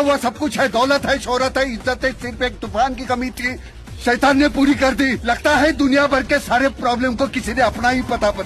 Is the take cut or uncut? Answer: uncut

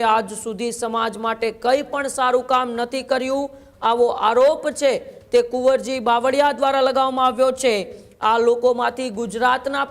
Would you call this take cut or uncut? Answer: uncut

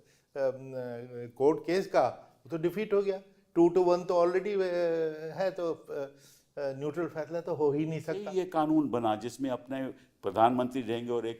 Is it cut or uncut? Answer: cut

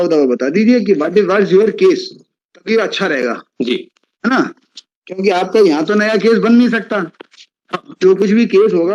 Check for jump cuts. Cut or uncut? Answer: uncut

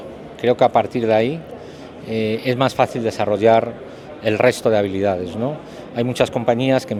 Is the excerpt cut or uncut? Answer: uncut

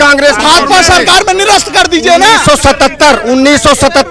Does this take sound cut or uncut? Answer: uncut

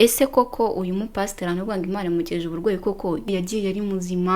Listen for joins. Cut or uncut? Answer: cut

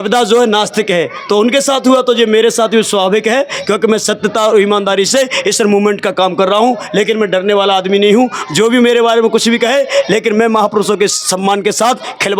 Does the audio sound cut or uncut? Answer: uncut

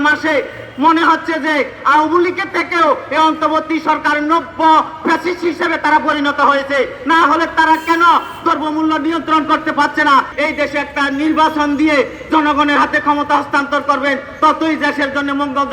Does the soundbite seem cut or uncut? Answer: cut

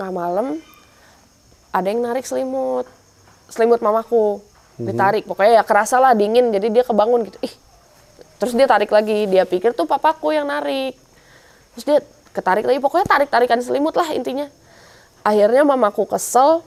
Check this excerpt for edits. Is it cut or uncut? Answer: uncut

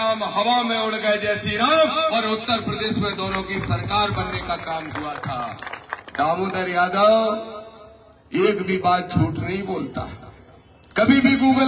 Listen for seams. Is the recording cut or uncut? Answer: uncut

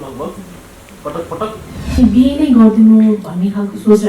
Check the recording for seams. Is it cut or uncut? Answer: cut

